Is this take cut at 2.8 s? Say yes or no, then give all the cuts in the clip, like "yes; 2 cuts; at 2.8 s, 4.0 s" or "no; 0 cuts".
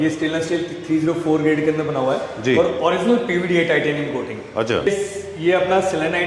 no; 1 cut; at 4.9 s